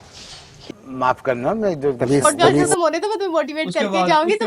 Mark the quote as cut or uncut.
cut